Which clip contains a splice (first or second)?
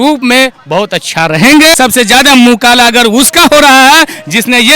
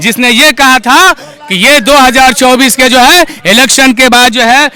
first